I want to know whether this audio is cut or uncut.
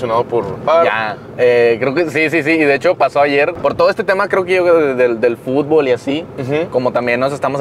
cut